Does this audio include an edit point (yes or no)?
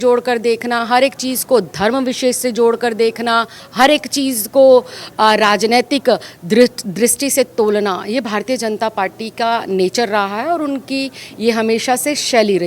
yes